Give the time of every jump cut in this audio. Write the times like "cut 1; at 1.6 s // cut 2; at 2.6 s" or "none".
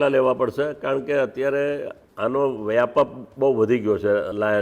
none